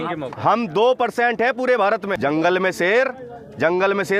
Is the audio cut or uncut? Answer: cut